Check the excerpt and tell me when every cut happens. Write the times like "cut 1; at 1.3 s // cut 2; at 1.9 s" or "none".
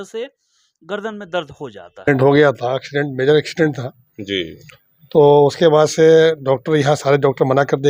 cut 1; at 2.1 s